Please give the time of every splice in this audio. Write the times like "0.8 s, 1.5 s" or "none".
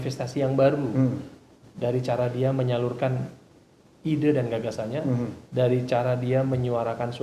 none